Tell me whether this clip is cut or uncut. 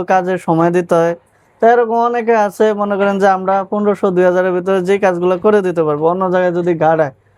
uncut